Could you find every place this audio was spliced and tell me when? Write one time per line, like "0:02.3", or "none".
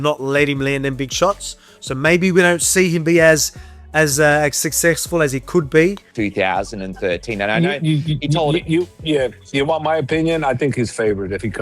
0:06.0